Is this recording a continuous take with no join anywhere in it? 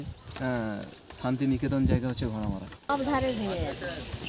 no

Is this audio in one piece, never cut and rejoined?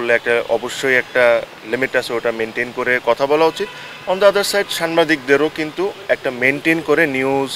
yes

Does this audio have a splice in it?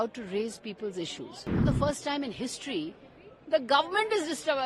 yes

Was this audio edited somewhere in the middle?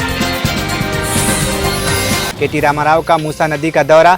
no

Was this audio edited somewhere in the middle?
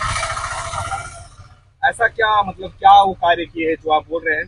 no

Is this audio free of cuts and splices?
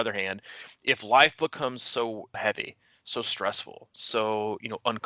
no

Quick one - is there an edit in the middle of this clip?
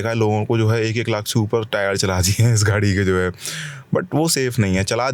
no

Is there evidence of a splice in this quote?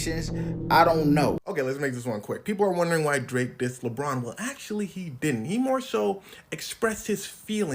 yes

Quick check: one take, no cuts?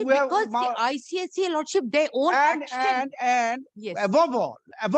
yes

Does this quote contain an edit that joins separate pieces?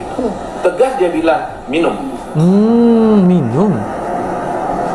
no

